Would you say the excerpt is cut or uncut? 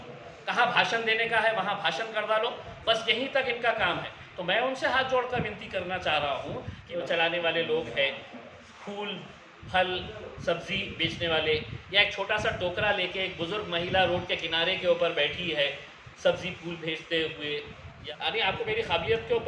cut